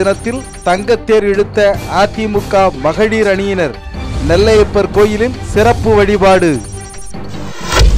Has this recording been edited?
no; 0 cuts

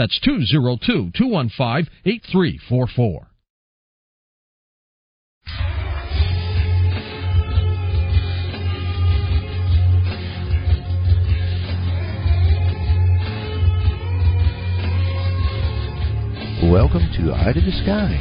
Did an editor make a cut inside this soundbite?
no; 0 cuts

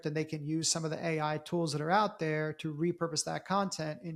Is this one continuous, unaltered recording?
yes; 0 cuts

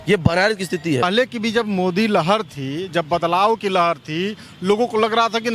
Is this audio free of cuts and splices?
no; 1 cut; at 1.0 s

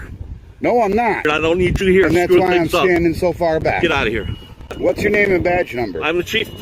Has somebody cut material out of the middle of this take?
yes; 2 cuts; at 1.3 s, 4.8 s

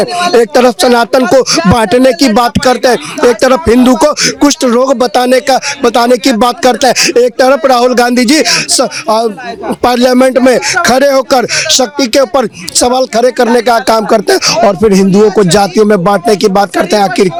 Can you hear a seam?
no; 0 cuts

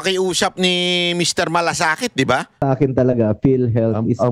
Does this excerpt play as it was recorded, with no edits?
no; 1 cut; at 2.6 s

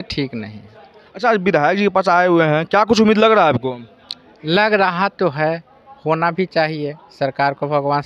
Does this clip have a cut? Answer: no; 0 cuts

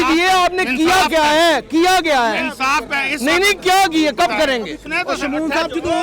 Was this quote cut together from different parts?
yes; 1 cut; at 4.8 s

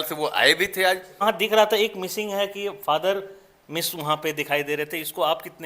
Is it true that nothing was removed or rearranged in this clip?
no; 1 cut; at 1.2 s

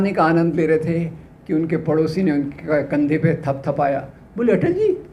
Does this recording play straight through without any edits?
yes; 0 cuts

